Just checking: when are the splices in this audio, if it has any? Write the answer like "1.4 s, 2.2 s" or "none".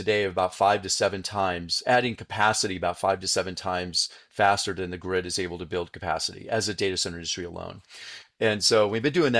none